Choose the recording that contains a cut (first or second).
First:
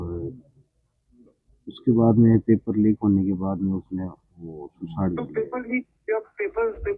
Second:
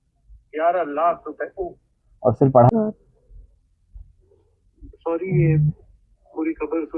second